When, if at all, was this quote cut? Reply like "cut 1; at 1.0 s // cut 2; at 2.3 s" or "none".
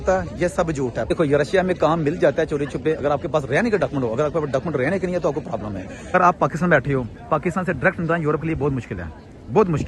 cut 1; at 1.1 s // cut 2; at 6.1 s